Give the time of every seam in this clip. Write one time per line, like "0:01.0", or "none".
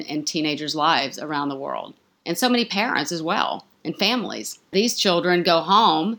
0:04.6